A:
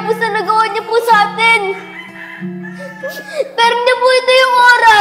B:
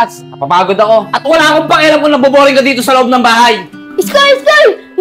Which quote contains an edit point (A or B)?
B